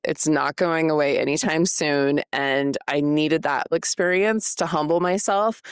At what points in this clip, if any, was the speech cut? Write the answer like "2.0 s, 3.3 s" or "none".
3.7 s